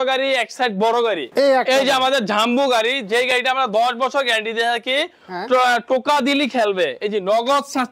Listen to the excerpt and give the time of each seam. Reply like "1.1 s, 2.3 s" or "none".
1.2 s